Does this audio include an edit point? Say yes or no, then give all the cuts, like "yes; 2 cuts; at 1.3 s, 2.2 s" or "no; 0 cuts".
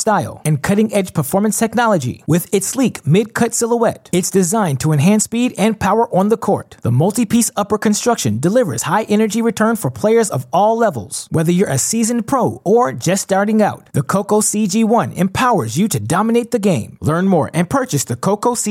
no; 0 cuts